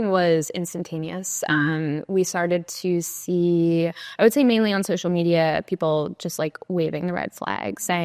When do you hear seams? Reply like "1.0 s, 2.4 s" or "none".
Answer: none